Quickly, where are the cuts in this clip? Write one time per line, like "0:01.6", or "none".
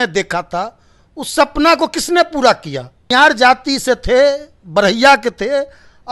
0:03.1